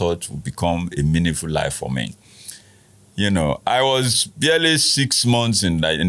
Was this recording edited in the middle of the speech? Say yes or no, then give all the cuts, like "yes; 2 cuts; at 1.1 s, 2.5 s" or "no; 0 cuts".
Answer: no; 0 cuts